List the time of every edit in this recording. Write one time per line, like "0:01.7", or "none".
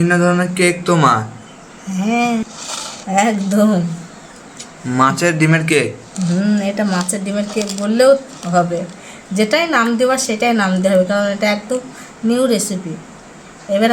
0:02.5